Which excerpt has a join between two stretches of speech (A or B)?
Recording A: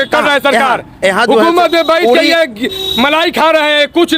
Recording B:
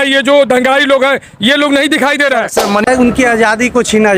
B